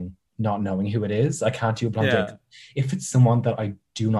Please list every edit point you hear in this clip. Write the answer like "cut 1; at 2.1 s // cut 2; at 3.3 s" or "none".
none